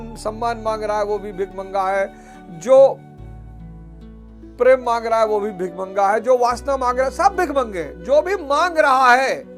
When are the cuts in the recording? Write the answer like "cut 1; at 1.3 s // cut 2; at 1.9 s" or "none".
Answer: cut 1; at 3.0 s // cut 2; at 4.5 s